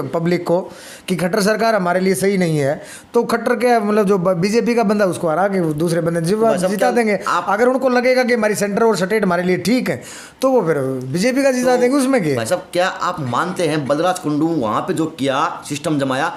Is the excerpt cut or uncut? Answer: uncut